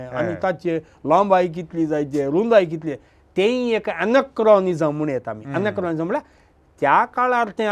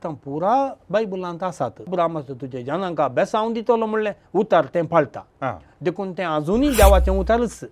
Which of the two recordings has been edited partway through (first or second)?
second